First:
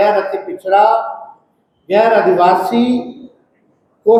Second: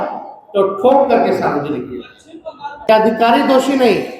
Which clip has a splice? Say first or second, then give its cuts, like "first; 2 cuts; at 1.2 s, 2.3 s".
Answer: second; 1 cut; at 2.9 s